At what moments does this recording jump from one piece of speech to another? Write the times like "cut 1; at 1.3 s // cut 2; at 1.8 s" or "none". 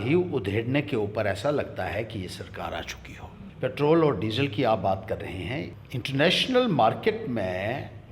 cut 1; at 3.4 s // cut 2; at 5.8 s